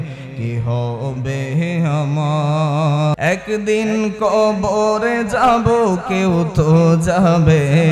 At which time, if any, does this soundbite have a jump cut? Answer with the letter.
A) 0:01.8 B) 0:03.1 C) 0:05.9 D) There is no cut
B